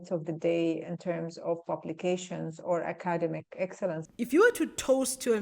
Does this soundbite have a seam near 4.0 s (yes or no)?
yes